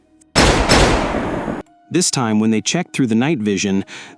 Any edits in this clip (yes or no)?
yes